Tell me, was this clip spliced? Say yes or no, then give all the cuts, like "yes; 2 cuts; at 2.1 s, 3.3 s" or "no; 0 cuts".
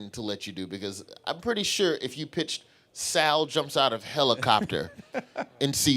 yes; 1 cut; at 2.1 s